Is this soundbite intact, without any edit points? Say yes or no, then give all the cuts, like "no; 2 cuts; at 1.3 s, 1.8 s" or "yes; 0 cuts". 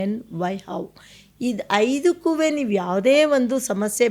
yes; 0 cuts